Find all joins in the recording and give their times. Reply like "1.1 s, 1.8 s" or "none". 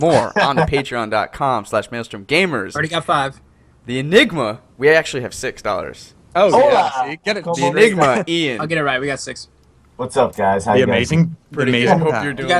none